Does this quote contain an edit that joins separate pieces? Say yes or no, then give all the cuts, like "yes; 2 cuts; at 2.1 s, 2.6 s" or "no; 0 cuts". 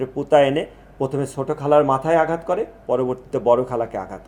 no; 0 cuts